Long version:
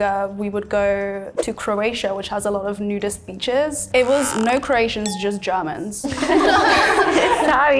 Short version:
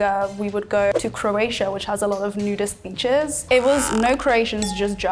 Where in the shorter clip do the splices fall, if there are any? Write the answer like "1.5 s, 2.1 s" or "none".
0.9 s